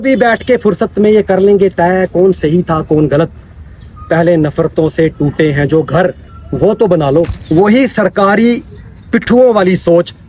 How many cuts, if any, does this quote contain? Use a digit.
1